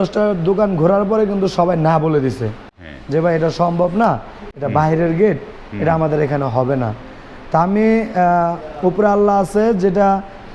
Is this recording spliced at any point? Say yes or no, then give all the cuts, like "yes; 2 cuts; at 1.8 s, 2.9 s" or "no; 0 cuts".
no; 0 cuts